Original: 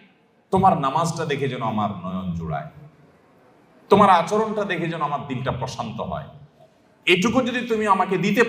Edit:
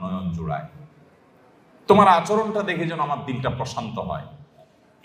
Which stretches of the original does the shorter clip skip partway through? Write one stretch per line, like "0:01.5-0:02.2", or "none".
none

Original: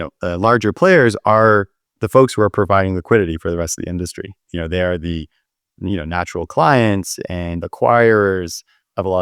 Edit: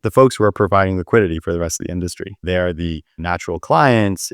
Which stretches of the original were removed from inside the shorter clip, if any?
0:04.4-0:04.7
0:05.4-0:06.1

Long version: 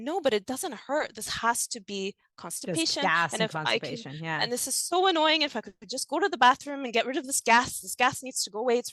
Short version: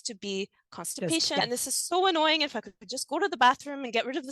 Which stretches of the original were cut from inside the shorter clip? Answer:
0:03.1-0:04.4

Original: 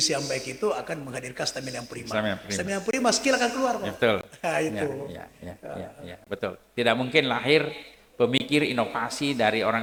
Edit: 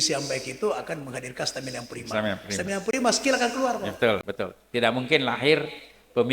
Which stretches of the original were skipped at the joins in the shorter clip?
0:04.3-0:06.3

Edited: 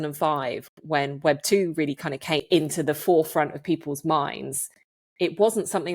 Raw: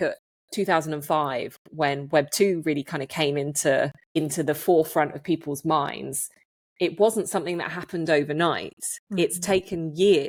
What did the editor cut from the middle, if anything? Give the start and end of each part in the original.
0:03.3-0:04.0

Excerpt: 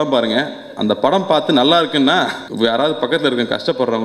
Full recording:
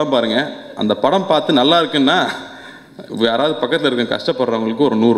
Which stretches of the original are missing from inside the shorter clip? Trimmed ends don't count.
0:02.4-0:03.0

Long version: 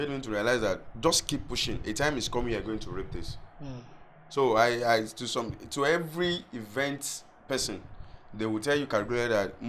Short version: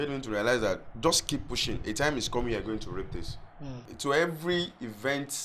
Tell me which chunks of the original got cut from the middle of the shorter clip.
0:03.9-0:05.6

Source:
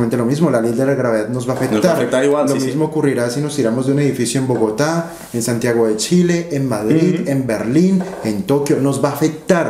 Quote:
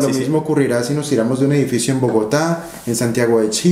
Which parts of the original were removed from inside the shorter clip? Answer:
none

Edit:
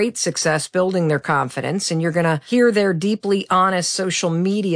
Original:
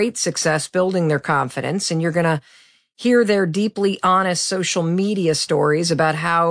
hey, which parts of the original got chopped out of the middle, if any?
0:02.4-0:03.0

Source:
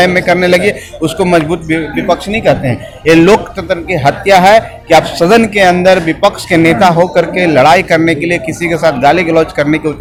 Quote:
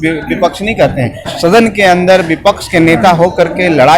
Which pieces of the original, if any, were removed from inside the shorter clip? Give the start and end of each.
0:03.0-0:05.1

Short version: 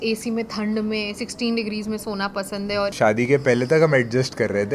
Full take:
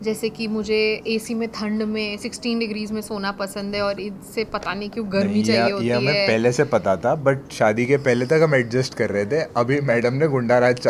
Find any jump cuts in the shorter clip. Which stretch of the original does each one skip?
0:04.0-0:07.5

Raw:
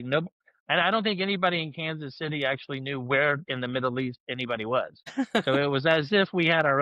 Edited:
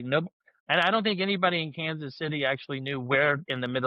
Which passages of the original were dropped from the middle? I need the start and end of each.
none

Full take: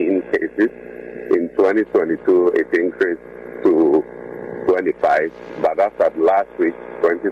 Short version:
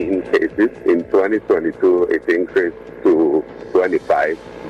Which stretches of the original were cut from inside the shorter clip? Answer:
0:00.8-0:01.2
0:03.3-0:03.4
0:04.2-0:04.5

